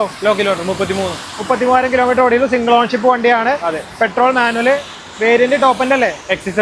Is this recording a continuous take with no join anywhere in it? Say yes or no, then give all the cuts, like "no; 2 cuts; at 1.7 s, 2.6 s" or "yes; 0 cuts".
yes; 0 cuts